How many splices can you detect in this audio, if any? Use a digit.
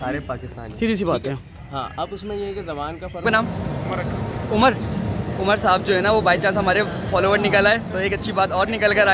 1